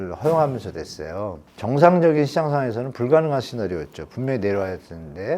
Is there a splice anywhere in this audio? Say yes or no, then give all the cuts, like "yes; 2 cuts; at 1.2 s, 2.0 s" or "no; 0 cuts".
no; 0 cuts